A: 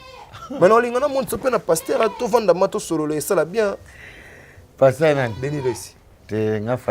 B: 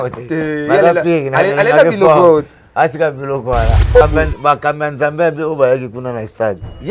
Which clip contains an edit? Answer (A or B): B